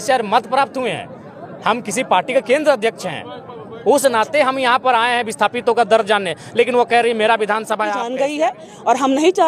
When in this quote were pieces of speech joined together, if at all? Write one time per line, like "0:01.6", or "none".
0:08.0